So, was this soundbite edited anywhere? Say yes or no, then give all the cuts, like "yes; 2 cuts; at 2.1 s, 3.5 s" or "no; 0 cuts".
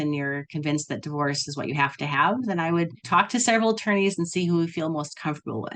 yes; 1 cut; at 3.0 s